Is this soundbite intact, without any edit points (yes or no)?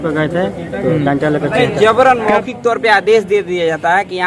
no